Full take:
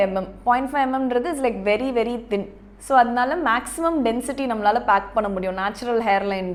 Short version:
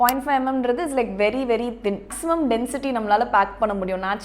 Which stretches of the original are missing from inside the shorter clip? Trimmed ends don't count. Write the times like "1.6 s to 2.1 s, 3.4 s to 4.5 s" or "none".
2.6 s to 3.7 s

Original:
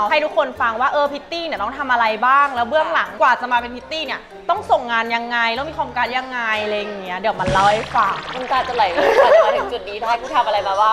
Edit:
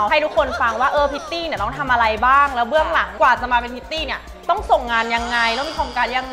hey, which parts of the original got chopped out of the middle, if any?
none

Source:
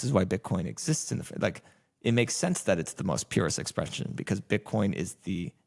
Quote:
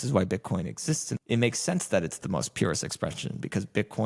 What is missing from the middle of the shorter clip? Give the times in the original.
1.1 s to 1.9 s

